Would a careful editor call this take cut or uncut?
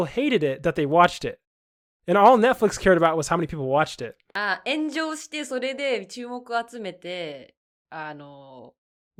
uncut